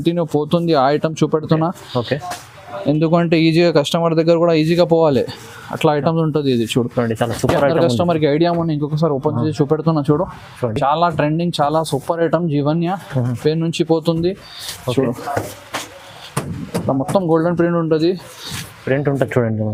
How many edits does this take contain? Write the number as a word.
zero